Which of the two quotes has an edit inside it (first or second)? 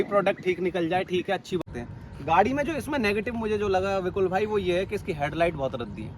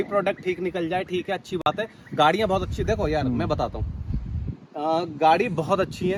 first